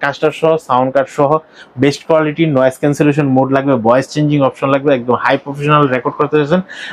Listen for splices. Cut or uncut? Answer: uncut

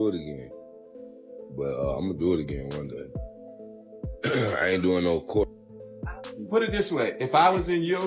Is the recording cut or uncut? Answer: cut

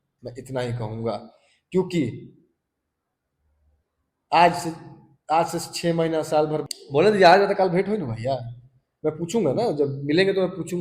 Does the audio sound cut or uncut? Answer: cut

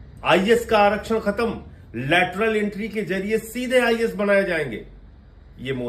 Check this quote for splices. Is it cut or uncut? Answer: uncut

